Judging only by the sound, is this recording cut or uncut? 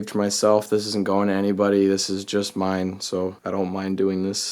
cut